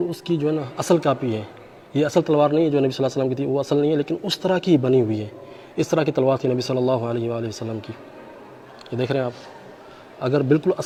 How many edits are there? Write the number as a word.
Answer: zero